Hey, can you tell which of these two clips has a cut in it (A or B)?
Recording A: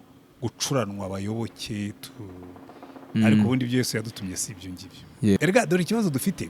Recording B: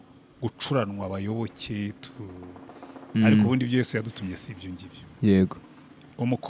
A